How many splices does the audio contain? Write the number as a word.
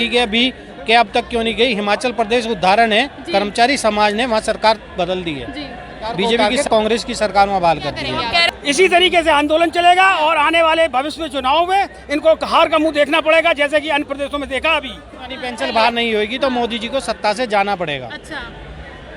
three